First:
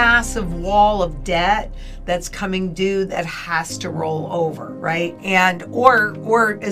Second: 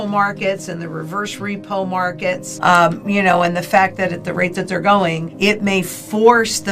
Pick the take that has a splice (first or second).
second